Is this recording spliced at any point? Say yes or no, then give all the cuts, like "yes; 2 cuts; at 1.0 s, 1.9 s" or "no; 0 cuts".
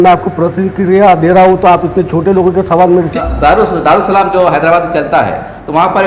yes; 1 cut; at 3.2 s